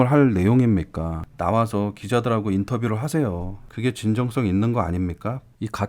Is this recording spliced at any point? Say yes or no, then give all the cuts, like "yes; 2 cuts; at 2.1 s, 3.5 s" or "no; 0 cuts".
yes; 1 cut; at 1.2 s